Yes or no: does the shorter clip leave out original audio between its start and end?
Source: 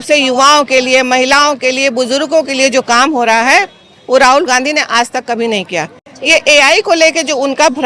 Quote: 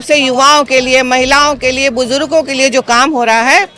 no